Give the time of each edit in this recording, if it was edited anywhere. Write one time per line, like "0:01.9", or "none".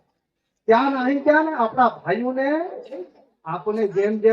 0:03.0